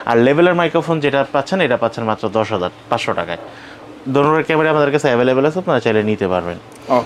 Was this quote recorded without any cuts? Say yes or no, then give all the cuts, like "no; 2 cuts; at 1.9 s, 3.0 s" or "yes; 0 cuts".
yes; 0 cuts